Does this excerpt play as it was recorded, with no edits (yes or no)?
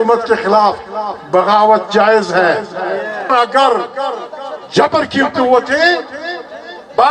no